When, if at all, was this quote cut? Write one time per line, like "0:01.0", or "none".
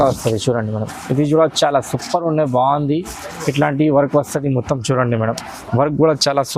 0:05.5